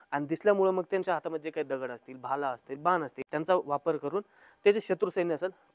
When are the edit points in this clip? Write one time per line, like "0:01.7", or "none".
none